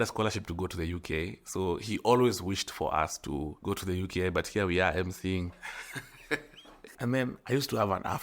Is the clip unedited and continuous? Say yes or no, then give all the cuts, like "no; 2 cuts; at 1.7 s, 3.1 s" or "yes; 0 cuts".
no; 2 cuts; at 3.5 s, 6.9 s